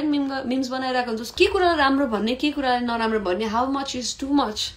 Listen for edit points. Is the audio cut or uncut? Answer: cut